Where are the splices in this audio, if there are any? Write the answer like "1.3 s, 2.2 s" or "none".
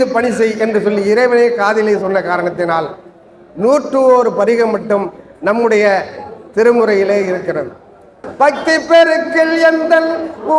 8.2 s